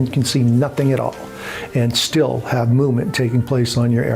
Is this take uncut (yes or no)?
yes